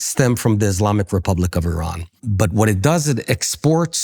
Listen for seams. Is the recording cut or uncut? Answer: cut